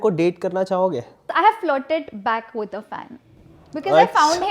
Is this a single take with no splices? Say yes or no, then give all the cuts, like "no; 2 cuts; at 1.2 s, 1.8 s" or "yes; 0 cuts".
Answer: no; 1 cut; at 1.3 s